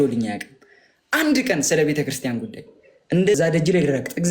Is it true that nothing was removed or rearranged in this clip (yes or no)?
no